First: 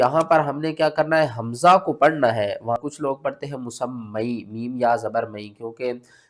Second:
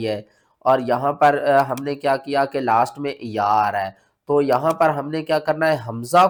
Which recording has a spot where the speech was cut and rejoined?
first; 1 cut; at 2.8 s

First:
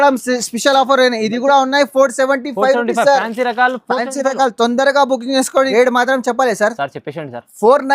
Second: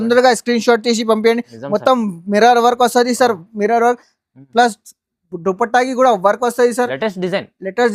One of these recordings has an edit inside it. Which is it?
first; 1 cut; at 5.7 s

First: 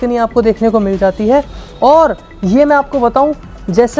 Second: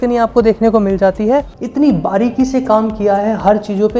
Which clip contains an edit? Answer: second; 1 cut; at 1.6 s

